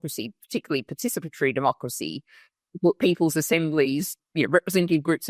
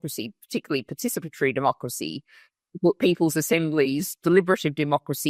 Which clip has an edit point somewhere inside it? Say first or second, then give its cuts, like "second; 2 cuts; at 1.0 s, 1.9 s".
first; 1 cut; at 4.1 s